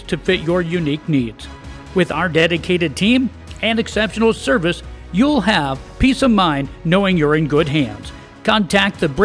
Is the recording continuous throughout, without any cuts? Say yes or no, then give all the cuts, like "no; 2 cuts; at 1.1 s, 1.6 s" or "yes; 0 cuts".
yes; 0 cuts